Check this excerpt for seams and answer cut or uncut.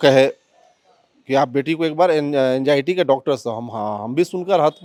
uncut